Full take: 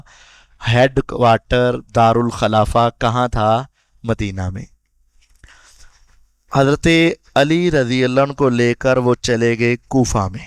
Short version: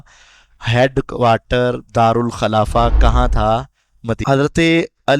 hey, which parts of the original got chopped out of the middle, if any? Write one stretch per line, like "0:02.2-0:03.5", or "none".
0:04.2-0:06.5